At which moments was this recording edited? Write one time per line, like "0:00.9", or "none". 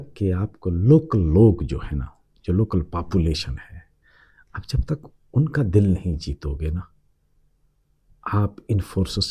none